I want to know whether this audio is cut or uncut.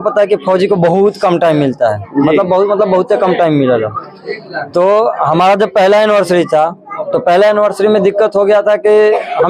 uncut